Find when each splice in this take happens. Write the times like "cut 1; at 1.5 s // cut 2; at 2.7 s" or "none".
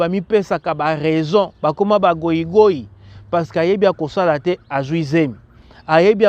none